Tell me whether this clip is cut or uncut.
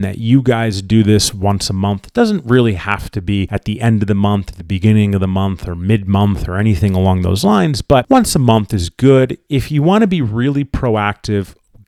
uncut